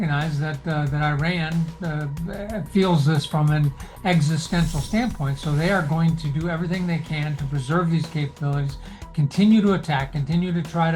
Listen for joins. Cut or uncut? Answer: uncut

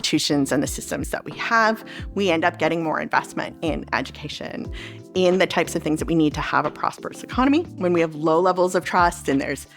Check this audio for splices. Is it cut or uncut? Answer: cut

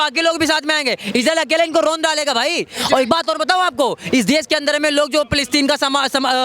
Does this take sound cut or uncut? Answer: uncut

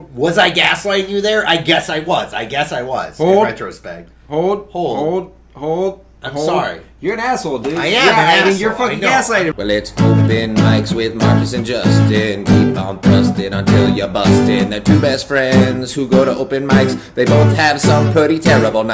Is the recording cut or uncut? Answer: cut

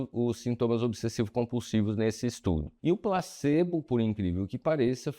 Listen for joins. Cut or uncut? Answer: cut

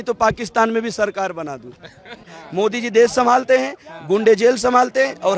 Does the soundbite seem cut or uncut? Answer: cut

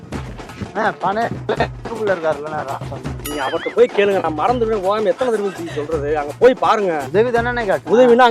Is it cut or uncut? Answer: cut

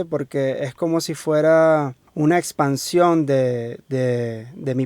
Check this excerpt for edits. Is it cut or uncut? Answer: cut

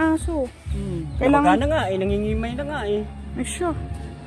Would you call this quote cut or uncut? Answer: uncut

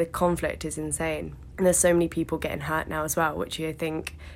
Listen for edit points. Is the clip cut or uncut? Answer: cut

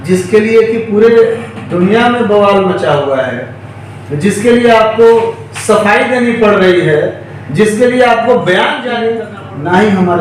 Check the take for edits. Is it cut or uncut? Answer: cut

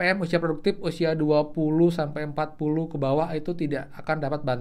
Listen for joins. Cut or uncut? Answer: uncut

